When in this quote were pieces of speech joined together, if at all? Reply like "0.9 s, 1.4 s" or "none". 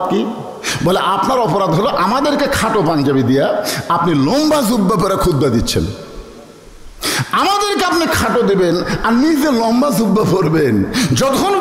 none